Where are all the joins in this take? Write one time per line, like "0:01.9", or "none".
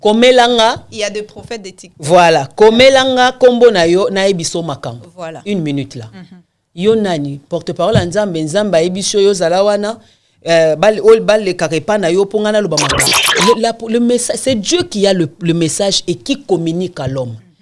0:13.2